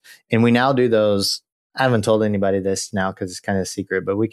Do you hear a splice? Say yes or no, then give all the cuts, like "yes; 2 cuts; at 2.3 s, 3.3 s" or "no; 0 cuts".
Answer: no; 0 cuts